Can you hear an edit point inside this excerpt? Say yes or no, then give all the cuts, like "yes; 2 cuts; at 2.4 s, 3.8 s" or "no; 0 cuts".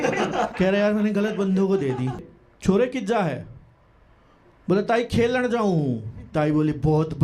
yes; 1 cut; at 2.3 s